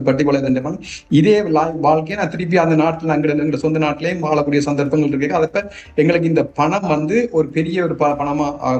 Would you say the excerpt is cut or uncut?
uncut